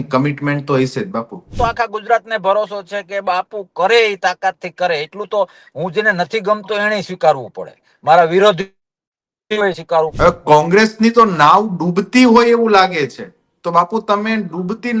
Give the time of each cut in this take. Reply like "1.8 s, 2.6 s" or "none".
1.6 s, 10.1 s